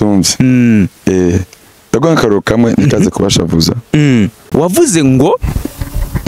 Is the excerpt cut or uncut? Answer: cut